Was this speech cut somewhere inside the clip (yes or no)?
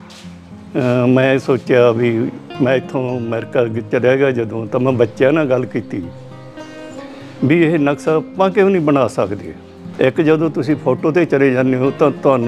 yes